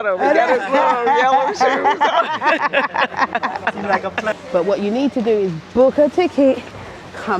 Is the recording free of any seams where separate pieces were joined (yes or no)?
no